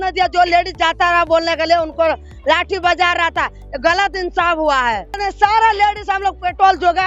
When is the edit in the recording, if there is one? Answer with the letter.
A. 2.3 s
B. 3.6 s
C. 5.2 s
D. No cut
C